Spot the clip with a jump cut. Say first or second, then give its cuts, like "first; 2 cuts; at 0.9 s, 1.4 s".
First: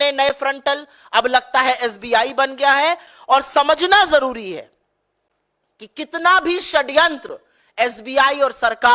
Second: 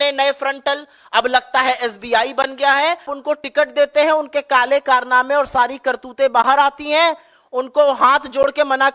second; 1 cut; at 3.1 s